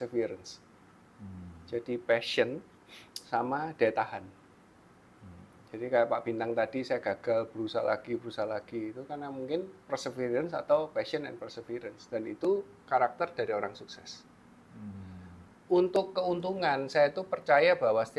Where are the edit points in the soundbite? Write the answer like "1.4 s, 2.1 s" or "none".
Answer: none